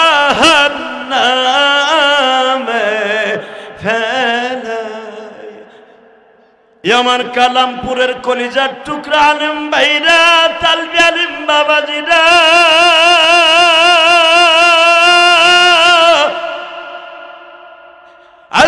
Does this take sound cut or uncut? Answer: cut